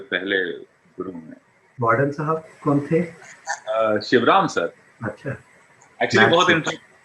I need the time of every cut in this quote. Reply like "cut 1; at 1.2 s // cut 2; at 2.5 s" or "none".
cut 1; at 1.7 s